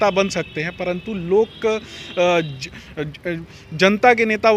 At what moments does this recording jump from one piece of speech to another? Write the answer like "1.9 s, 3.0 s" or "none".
none

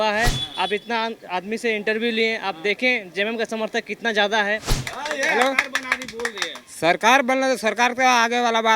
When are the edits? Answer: 4.8 s

